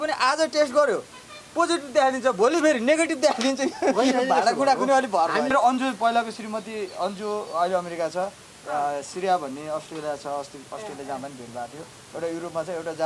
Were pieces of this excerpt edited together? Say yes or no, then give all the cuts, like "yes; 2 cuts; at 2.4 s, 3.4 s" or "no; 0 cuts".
yes; 1 cut; at 5.5 s